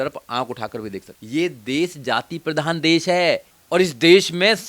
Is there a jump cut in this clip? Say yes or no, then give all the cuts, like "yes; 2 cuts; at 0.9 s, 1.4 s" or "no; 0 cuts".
yes; 2 cuts; at 1.1 s, 3.5 s